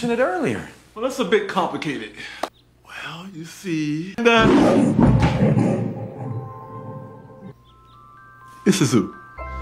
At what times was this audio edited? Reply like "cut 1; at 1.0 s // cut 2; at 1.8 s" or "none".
cut 1; at 4.1 s